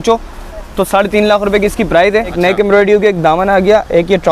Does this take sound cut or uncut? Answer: cut